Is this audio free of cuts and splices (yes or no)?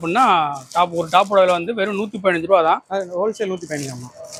yes